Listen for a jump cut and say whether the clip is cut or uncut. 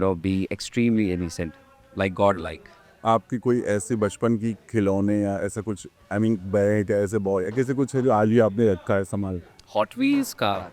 uncut